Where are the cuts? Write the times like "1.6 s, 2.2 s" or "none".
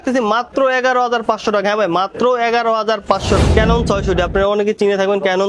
3.4 s

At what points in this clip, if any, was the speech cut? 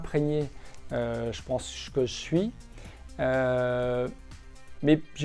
none

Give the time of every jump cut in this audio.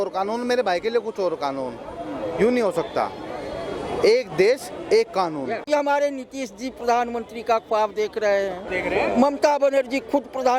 5.7 s, 8.7 s

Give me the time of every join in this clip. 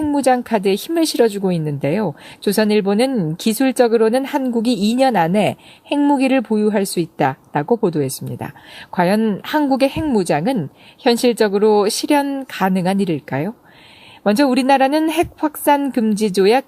2.4 s

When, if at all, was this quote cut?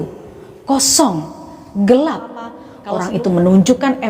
2.5 s

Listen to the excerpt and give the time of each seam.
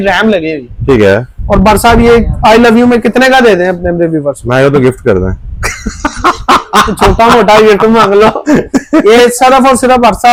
none

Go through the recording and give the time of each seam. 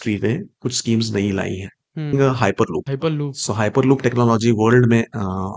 2.1 s, 2.9 s

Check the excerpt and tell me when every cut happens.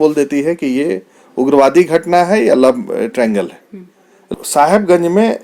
4.3 s

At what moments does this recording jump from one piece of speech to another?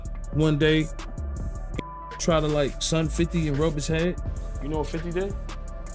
none

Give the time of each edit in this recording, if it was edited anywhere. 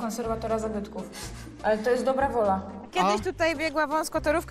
2.8 s

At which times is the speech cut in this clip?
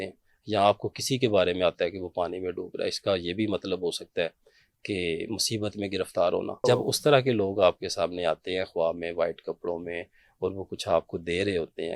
6.6 s

